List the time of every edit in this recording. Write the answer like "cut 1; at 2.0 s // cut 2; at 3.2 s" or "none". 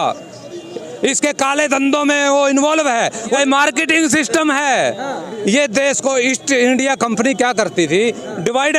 cut 1; at 3.4 s